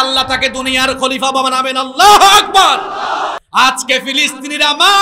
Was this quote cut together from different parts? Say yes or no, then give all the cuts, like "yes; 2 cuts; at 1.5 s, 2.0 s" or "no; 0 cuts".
yes; 1 cut; at 3.4 s